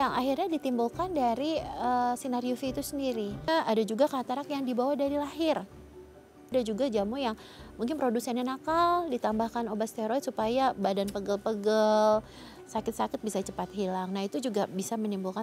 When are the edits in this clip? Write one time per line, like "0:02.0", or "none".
0:03.5
0:06.5